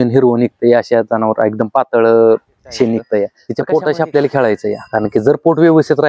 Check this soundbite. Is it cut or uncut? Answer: cut